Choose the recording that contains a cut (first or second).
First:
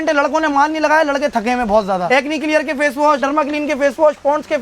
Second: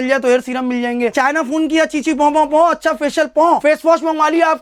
first